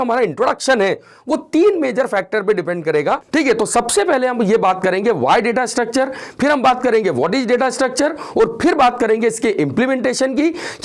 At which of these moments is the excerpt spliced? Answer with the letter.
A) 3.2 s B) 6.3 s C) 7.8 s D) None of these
A